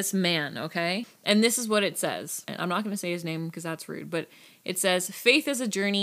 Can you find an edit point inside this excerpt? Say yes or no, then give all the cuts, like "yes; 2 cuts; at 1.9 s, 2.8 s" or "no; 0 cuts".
yes; 2 cuts; at 1.1 s, 2.5 s